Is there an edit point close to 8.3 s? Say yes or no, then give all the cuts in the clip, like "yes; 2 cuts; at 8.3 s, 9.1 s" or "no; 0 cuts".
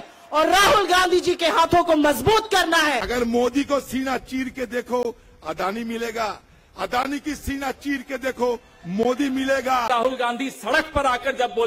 no; 2 cuts; at 3.0 s, 9.9 s